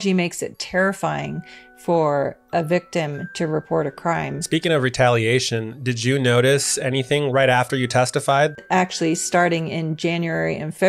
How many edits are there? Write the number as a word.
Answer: two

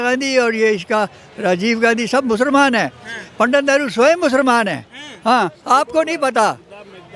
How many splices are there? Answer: zero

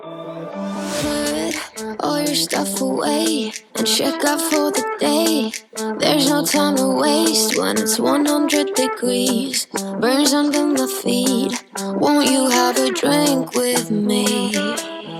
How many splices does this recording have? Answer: zero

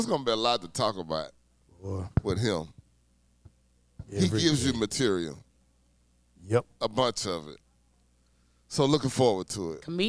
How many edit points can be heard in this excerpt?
zero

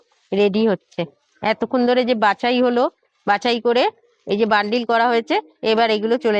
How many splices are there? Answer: zero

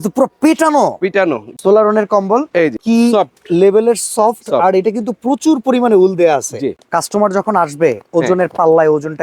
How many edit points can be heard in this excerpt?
three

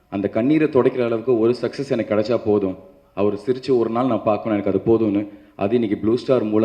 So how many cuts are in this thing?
zero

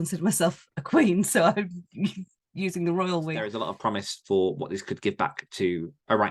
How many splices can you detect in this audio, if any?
one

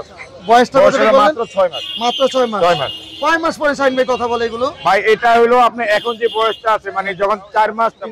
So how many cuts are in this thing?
zero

